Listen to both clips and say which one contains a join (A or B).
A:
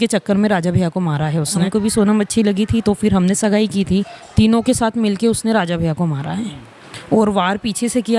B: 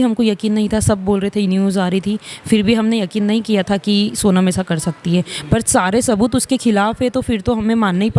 A